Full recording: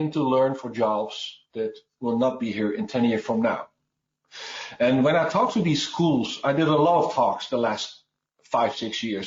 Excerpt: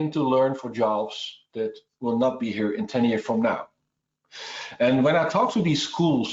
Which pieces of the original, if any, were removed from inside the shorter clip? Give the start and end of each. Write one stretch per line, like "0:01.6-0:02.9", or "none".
none

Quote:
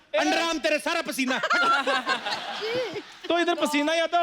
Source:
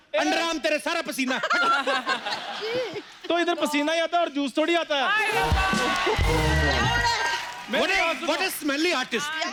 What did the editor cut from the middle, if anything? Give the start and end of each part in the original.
none

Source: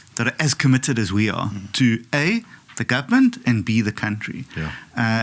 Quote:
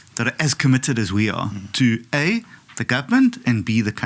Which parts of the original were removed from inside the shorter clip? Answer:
none

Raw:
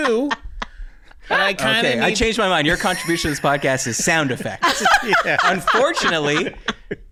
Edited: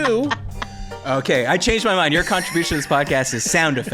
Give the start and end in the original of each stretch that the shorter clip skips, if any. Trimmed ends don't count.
0:01.0-0:01.6

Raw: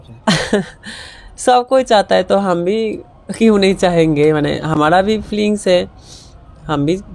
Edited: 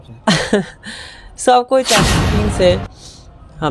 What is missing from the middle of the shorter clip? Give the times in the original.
0:02.1-0:05.2

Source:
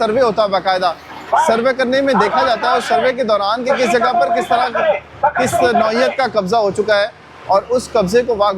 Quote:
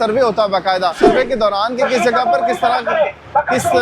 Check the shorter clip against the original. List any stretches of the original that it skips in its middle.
0:01.0-0:02.9

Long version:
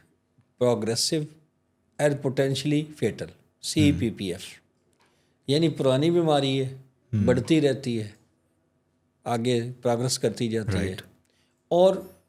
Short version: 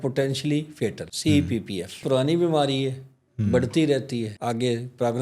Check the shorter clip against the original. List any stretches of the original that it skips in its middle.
0:03.3-0:03.6
0:04.5-0:05.8
0:08.1-0:09.2

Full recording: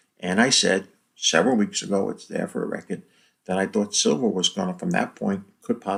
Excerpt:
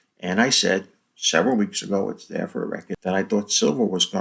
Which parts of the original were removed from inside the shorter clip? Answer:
0:02.9-0:03.3

